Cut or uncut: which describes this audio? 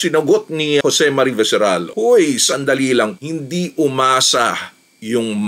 cut